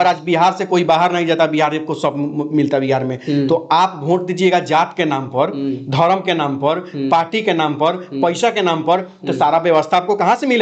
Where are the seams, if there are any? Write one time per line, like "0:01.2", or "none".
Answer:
none